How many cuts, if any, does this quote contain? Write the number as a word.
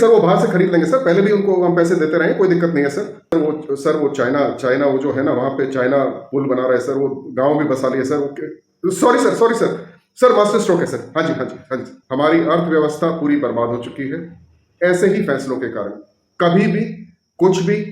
two